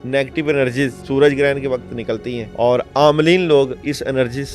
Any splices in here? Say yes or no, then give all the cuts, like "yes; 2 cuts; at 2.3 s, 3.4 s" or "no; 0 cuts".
yes; 2 cuts; at 1.0 s, 2.4 s